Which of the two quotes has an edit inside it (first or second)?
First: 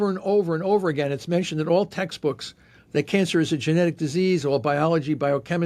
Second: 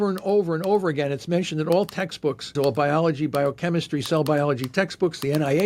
second